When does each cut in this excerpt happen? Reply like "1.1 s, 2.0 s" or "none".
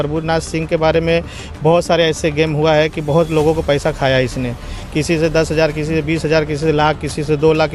none